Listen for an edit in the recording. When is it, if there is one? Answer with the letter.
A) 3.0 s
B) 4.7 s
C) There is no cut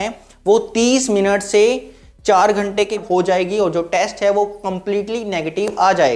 A